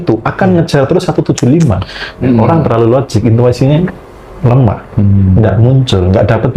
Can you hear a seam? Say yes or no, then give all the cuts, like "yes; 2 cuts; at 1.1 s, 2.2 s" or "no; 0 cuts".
yes; 1 cut; at 2.2 s